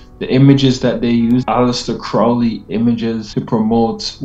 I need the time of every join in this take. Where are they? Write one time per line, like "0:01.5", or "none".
0:01.4
0:03.3